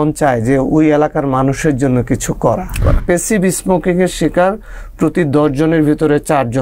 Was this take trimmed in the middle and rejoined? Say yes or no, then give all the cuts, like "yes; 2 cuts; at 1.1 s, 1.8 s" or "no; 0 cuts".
yes; 1 cut; at 3.0 s